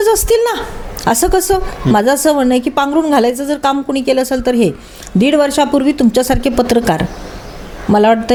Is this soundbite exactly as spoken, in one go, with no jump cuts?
yes; 0 cuts

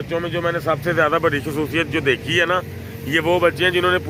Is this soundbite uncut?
yes; 0 cuts

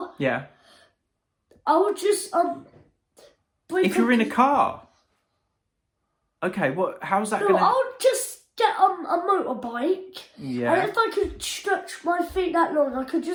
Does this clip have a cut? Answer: no; 0 cuts

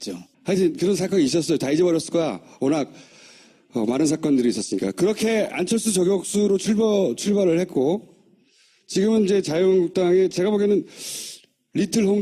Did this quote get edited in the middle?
yes; 1 cut; at 4.8 s

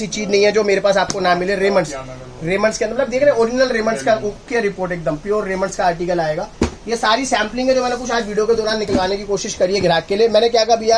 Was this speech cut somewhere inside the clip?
no; 0 cuts

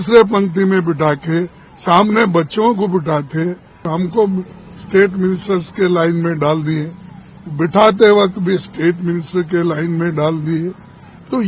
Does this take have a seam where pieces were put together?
yes; 1 cut; at 3.9 s

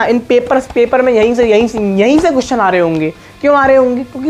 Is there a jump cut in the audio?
no; 0 cuts

